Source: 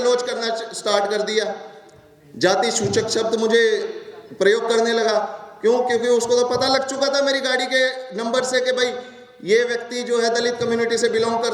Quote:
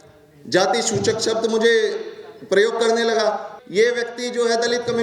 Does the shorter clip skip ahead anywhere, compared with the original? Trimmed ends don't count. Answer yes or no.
yes